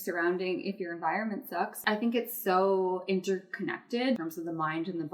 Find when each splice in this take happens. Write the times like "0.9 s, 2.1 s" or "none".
1.8 s, 4.2 s